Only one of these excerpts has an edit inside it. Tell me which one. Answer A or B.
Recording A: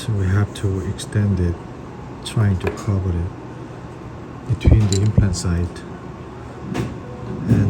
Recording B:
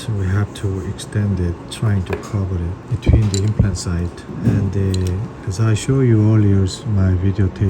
B